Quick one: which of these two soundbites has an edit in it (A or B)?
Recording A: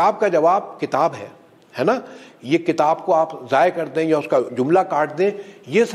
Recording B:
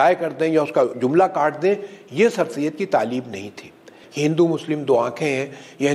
B